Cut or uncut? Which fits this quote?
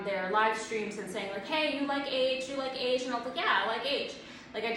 uncut